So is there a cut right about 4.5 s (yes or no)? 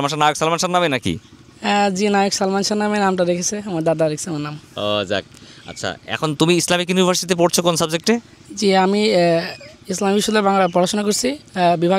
no